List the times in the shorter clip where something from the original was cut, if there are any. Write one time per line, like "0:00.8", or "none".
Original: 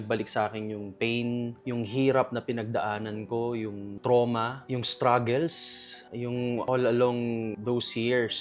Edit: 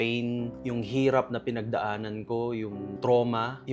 none